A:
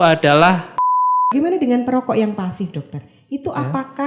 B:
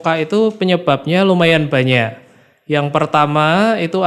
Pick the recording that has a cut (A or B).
A